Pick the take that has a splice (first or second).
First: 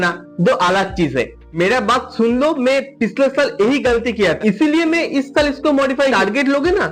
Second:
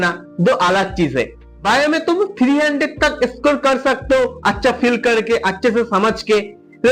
first